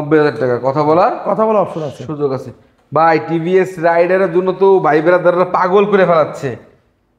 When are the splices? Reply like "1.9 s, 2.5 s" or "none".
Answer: none